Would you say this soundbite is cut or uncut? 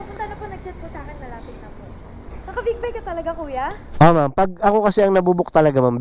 cut